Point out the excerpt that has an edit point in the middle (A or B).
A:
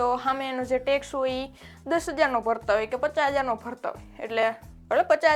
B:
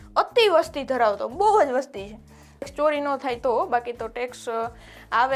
B